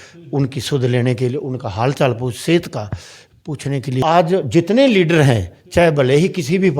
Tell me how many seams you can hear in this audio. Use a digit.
1